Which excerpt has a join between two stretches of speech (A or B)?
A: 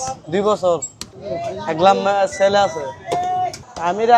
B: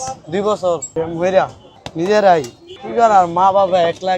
B